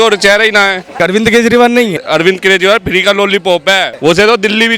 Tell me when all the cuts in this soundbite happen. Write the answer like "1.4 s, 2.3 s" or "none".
1.0 s, 2.0 s, 3.9 s